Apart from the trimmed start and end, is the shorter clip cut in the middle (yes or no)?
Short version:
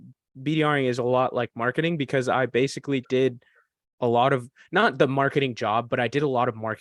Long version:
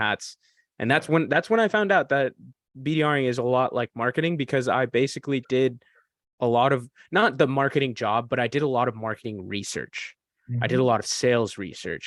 no